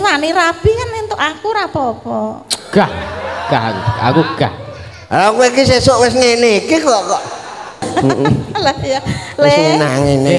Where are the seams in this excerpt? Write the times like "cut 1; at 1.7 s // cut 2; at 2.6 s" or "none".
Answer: cut 1; at 7.9 s